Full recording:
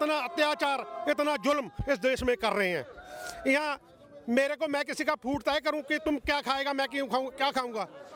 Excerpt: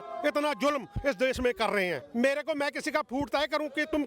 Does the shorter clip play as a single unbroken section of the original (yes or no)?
no